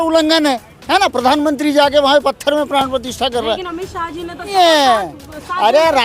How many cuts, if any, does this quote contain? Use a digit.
1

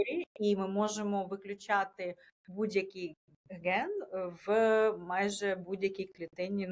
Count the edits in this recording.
0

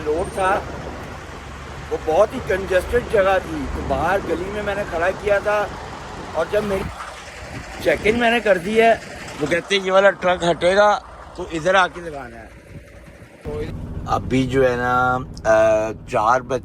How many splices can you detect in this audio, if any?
2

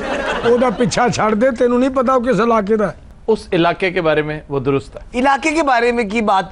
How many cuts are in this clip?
1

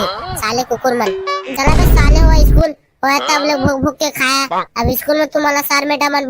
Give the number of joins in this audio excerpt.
1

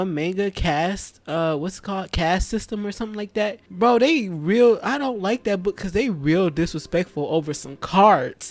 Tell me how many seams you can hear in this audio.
0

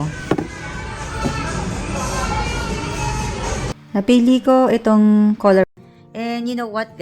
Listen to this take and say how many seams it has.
1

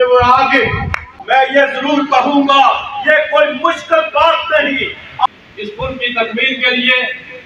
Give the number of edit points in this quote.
2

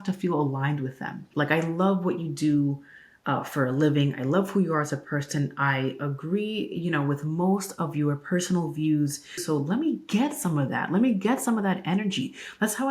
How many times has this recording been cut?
2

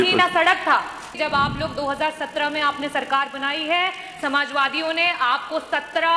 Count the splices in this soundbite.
1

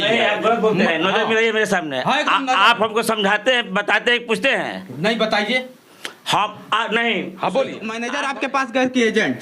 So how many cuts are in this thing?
1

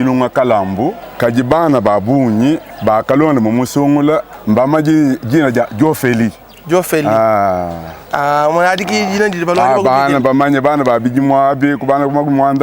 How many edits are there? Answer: 0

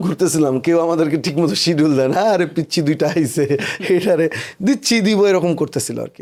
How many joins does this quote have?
0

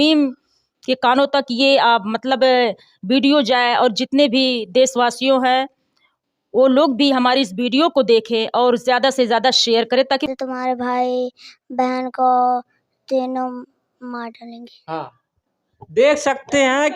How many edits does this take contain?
1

